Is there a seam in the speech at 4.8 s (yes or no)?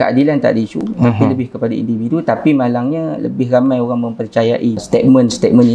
yes